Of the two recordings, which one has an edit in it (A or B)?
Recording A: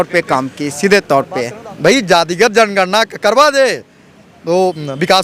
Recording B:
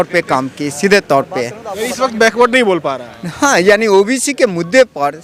A